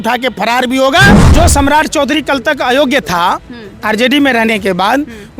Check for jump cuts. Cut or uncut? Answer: cut